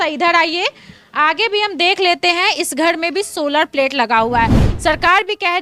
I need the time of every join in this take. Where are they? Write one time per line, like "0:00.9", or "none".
0:04.7